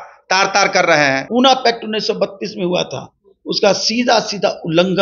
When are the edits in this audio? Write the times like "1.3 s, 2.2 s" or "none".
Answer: 1.3 s